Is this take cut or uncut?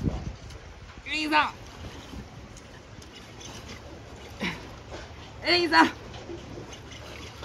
uncut